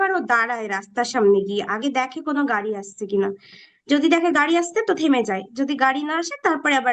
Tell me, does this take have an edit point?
no; 0 cuts

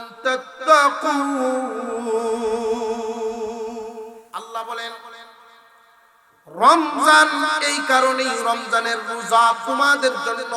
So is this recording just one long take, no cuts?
no; 1 cut; at 4.1 s

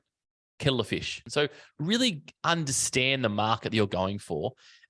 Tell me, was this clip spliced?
yes; 1 cut; at 1.2 s

